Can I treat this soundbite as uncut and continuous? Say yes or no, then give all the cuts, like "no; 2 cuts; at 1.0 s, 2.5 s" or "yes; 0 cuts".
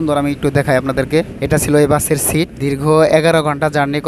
no; 2 cuts; at 1.4 s, 2.5 s